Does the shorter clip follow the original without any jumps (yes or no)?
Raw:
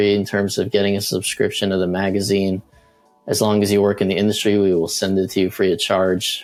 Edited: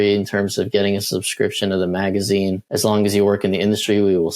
no